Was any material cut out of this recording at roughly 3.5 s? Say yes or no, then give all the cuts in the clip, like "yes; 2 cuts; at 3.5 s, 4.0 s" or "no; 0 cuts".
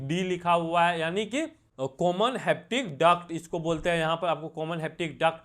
no; 1 cut; at 1.6 s